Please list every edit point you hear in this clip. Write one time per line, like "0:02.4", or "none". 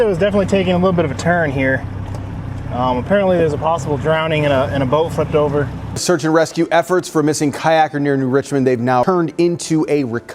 0:06.0
0:09.0